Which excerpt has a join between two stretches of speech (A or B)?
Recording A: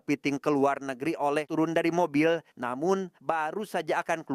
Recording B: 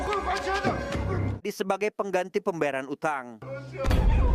A